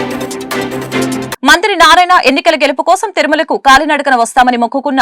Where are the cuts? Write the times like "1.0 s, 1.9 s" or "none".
1.3 s